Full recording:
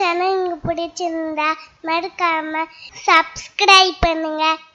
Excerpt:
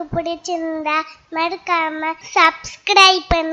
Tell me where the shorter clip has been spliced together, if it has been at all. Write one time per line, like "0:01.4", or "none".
0:02.2